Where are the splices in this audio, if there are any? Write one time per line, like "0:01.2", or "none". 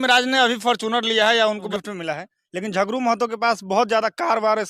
0:01.7

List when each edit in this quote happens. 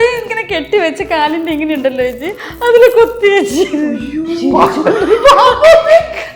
none

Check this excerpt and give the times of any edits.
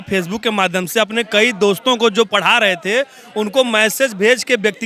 none

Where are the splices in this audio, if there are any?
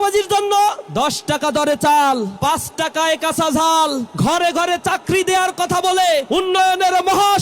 0:00.8
0:02.3
0:04.1
0:06.3

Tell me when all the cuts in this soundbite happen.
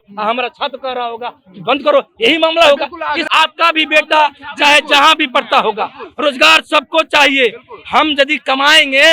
0:03.2

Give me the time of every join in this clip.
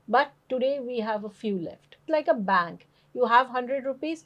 0:02.0

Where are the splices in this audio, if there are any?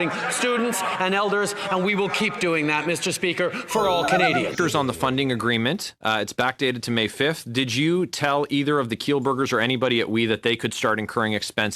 0:04.5

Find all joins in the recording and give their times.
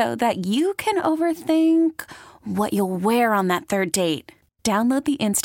none

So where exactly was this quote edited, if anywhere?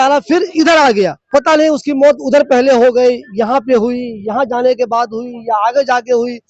0:01.2

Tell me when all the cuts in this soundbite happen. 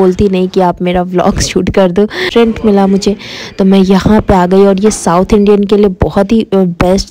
0:02.2

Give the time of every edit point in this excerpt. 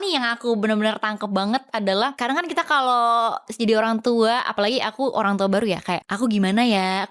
0:02.1
0:06.1

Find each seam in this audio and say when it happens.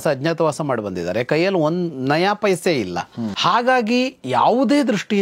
0:03.3

